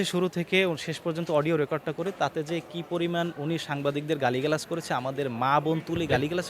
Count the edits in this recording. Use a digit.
0